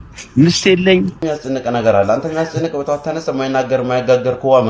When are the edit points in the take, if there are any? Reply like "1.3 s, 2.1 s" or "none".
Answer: 1.2 s

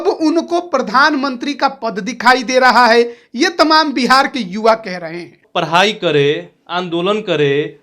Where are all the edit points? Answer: 5.4 s

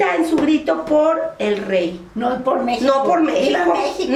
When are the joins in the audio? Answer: none

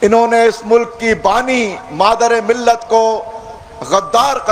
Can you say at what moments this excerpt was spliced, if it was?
none

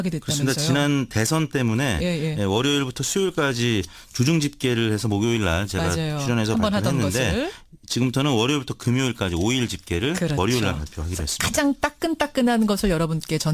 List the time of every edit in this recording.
none

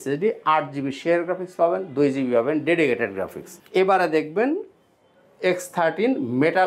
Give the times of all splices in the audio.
3.6 s

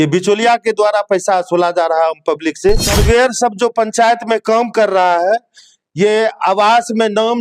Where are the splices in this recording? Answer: 2.9 s

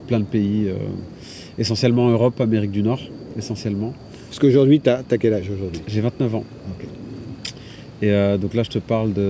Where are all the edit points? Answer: none

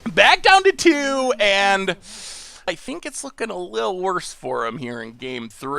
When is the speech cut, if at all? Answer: 2.8 s

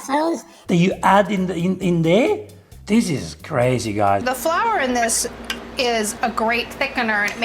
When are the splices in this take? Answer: 4.2 s

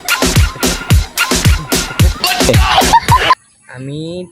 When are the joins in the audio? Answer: 3.3 s

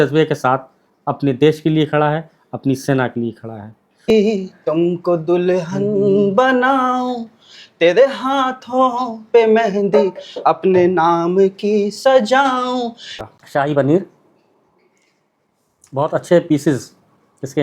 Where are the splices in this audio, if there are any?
4.1 s, 13.2 s

